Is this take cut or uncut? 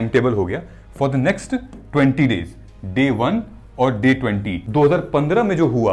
cut